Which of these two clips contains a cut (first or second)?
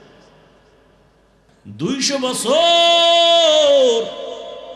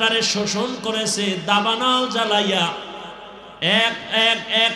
first